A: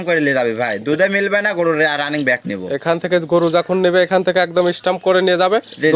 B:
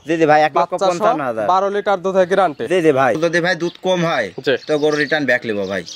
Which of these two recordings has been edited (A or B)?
B